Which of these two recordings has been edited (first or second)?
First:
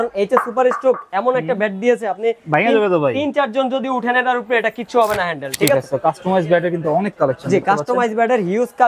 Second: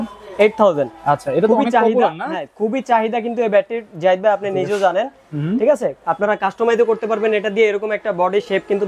first